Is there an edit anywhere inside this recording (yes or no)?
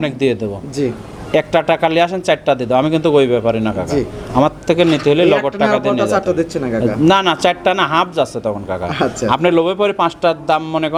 no